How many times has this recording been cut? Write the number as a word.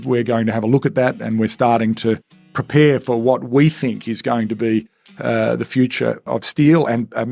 one